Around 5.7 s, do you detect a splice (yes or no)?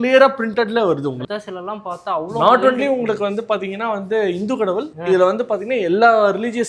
no